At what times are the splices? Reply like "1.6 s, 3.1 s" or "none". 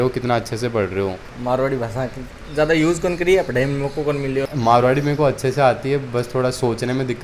1.3 s, 4.5 s